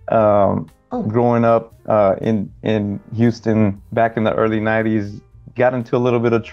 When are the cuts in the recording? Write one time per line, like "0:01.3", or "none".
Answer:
0:03.8